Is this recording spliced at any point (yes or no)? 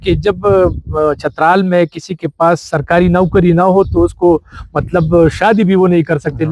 no